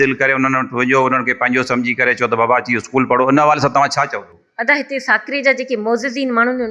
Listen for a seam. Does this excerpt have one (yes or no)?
no